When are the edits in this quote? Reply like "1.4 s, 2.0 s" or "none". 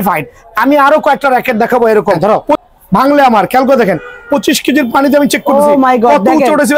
2.2 s